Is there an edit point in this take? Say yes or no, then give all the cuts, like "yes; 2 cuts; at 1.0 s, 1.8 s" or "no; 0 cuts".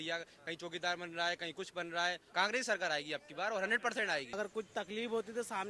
yes; 2 cuts; at 2.2 s, 4.3 s